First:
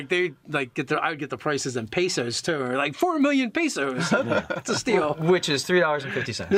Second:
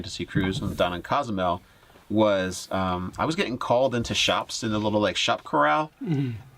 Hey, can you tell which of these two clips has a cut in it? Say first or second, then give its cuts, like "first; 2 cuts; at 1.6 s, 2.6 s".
second; 1 cut; at 2.6 s